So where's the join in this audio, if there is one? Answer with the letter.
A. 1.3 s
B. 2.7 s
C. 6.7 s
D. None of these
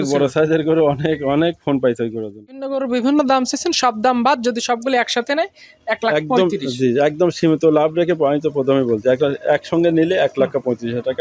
B